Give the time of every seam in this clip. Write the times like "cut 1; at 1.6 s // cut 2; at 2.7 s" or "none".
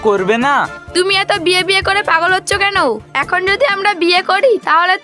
none